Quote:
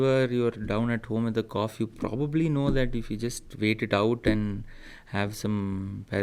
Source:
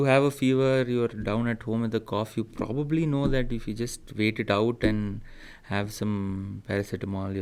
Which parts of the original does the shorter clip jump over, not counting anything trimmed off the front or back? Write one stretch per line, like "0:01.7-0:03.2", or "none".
none